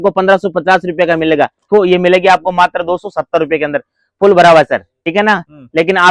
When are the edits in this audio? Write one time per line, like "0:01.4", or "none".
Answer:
0:01.7
0:05.0